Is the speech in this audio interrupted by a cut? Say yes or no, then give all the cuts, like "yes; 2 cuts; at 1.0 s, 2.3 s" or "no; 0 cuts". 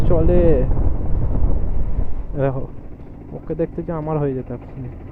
no; 0 cuts